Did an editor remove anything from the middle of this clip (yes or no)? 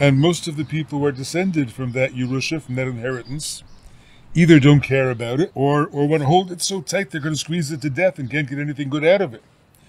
yes